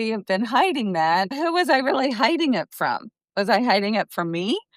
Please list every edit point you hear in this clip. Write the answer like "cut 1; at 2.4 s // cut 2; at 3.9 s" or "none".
cut 1; at 1.4 s